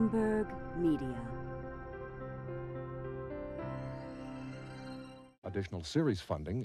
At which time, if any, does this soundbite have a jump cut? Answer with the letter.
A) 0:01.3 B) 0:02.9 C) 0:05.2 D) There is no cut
C